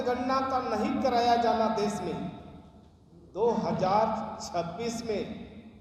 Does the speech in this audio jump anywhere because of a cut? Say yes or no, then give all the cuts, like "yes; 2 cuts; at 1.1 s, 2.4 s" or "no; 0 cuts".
no; 0 cuts